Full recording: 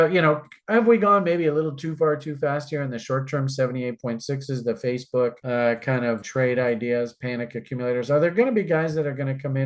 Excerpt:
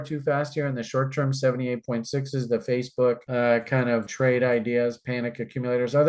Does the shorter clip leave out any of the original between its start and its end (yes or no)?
no